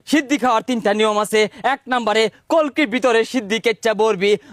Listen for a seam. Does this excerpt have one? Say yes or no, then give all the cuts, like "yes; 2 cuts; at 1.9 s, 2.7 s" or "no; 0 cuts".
no; 0 cuts